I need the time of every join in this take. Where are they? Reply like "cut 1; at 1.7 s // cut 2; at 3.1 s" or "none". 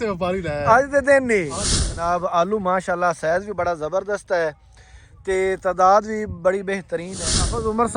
cut 1; at 1.9 s // cut 2; at 7.1 s